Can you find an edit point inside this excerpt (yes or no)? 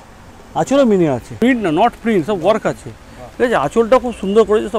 yes